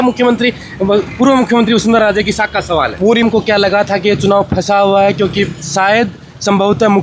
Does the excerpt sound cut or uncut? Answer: cut